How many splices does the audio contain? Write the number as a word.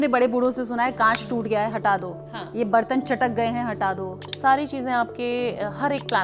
one